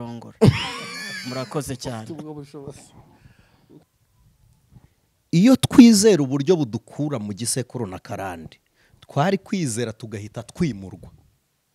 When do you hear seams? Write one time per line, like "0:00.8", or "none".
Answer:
0:03.6